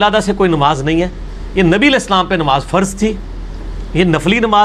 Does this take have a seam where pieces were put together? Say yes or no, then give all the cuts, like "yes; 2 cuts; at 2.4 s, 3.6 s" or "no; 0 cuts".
no; 0 cuts